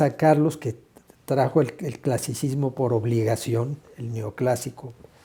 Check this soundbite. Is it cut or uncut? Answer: uncut